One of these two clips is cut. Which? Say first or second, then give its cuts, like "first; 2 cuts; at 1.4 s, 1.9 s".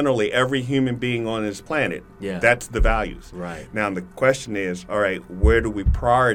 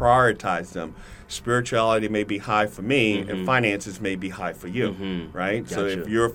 first; 1 cut; at 1.6 s